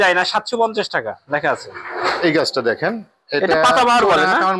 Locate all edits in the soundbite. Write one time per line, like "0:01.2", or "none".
0:02.2